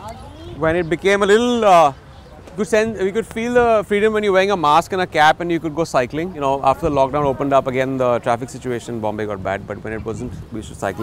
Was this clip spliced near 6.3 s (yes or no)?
yes